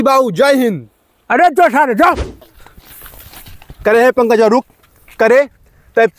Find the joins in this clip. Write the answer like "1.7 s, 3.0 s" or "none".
2.3 s